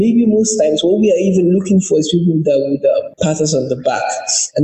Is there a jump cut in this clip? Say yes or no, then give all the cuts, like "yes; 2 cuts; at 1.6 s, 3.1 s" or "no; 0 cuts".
yes; 1 cut; at 3.1 s